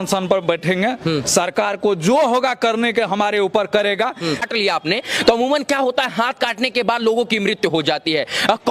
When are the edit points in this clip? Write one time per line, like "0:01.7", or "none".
0:04.4